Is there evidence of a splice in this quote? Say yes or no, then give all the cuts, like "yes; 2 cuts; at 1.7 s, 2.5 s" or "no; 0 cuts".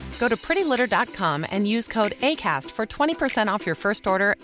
no; 0 cuts